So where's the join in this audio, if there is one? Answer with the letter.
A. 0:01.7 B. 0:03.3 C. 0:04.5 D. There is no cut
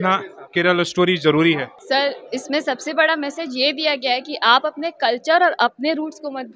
A